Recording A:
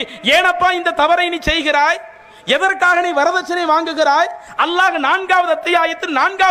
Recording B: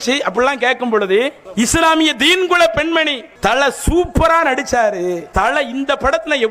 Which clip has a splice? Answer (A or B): B